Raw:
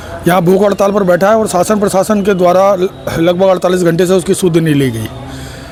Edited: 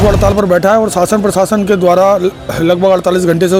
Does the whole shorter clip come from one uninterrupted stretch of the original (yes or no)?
yes